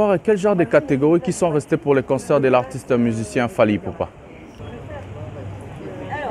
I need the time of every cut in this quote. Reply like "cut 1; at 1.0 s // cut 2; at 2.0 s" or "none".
cut 1; at 4.6 s